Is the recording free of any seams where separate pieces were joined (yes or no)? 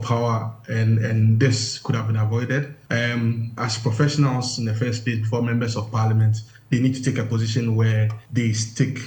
no